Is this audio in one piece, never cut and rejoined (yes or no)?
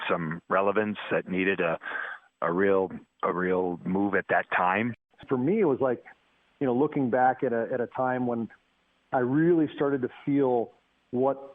no